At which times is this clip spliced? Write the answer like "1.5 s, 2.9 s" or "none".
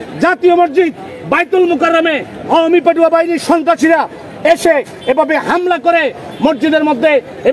none